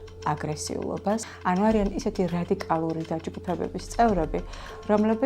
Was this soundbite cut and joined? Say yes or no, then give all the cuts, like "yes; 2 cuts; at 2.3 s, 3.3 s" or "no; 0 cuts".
yes; 1 cut; at 1.3 s